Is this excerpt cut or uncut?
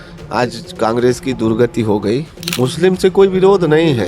cut